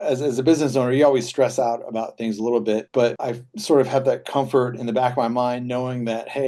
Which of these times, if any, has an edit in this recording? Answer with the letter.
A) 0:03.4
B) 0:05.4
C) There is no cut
C